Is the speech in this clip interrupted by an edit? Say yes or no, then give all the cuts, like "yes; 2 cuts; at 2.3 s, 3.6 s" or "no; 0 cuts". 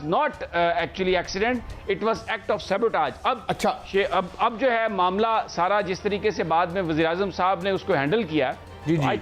no; 0 cuts